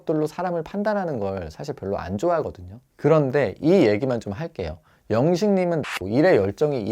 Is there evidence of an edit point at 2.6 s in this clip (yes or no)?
no